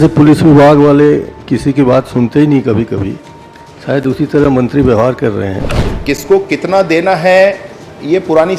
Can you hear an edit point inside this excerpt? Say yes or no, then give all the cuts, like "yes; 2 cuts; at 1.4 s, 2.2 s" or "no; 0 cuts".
yes; 1 cut; at 5.9 s